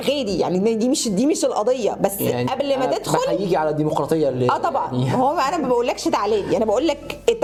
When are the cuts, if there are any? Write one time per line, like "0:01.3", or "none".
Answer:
none